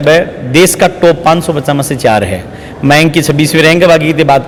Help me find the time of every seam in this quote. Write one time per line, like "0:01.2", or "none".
none